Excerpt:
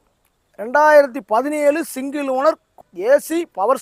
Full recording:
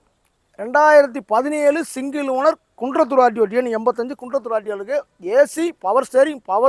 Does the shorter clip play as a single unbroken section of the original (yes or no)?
no